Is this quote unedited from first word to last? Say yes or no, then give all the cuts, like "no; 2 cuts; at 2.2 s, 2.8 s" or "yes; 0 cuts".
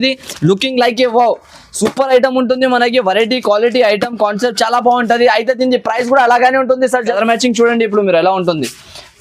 no; 1 cut; at 7.1 s